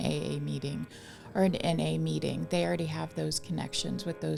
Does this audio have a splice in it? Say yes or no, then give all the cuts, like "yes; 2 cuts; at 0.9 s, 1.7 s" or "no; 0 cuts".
no; 0 cuts